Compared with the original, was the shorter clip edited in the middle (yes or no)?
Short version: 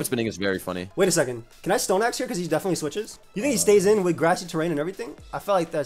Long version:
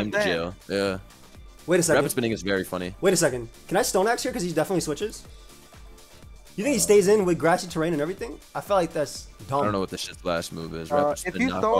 yes